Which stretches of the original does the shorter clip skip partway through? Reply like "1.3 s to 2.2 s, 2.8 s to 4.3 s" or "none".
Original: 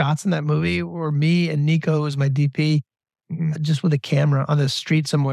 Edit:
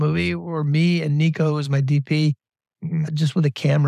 none